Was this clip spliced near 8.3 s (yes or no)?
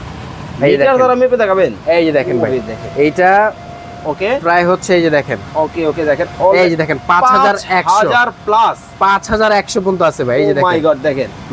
no